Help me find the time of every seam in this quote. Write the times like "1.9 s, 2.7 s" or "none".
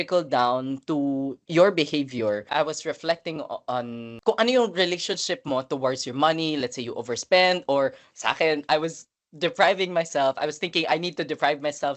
none